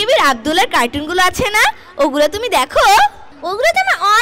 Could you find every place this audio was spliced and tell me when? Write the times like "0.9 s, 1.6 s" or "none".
3.3 s